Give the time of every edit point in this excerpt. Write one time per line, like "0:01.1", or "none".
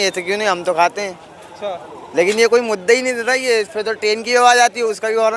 none